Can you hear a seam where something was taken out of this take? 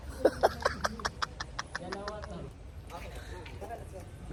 no; 0 cuts

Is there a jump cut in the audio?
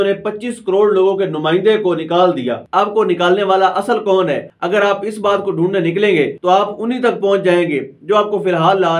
yes; 3 cuts; at 2.6 s, 4.5 s, 6.4 s

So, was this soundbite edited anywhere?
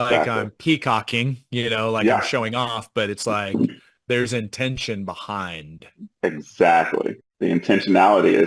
no; 0 cuts

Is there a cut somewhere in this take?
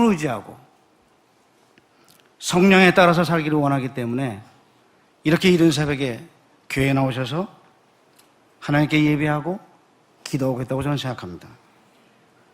yes; 1 cut; at 1.2 s

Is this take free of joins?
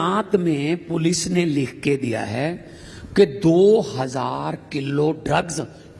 yes; 0 cuts

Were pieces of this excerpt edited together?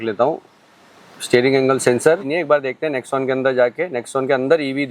yes; 1 cut; at 2.2 s

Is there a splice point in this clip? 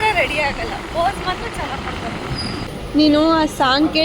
yes; 1 cut; at 2.8 s

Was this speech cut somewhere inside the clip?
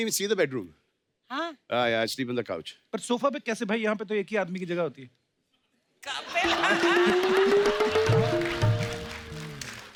no; 0 cuts

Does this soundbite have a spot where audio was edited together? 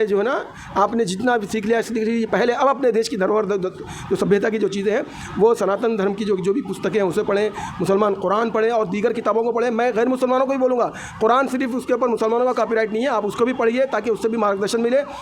no; 0 cuts

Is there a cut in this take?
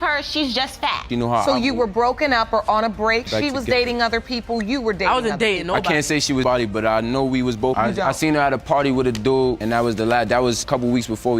yes; 1 cut; at 1.1 s

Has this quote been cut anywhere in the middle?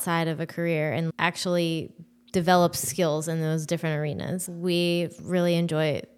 yes; 2 cuts; at 1.1 s, 4.4 s

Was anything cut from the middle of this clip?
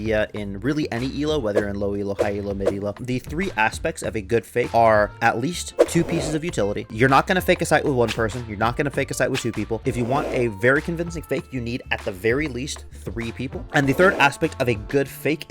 yes; 4 cuts; at 3.0 s, 4.7 s, 6.9 s, 13.6 s

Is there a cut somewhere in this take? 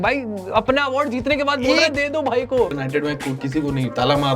yes; 1 cut; at 2.7 s

